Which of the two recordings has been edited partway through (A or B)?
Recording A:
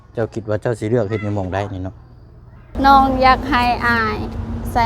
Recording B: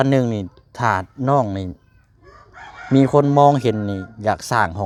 A